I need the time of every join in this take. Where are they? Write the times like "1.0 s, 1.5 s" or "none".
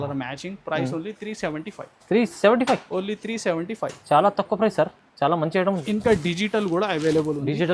5.8 s